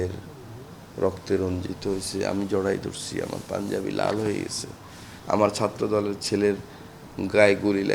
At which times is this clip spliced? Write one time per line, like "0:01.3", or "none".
none